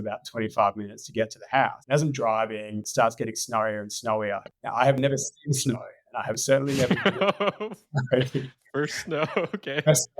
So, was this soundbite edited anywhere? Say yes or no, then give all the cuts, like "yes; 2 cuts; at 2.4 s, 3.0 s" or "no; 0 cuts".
yes; 3 cuts; at 1.8 s, 2.9 s, 4.5 s